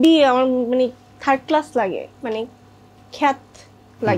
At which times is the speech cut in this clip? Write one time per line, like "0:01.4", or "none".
none